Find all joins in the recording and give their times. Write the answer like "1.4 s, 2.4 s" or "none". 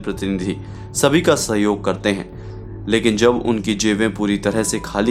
none